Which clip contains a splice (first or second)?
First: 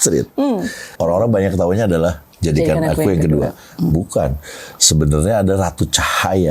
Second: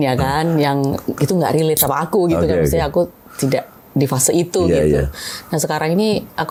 first